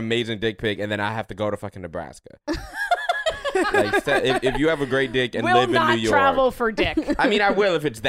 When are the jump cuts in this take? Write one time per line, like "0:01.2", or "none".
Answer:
none